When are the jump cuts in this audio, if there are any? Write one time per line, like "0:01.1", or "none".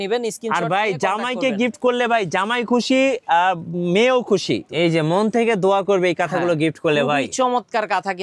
0:04.7